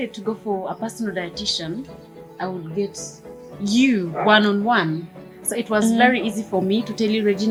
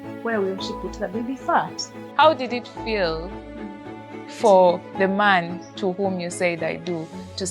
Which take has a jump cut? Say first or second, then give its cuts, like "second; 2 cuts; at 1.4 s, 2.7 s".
second; 1 cut; at 2.0 s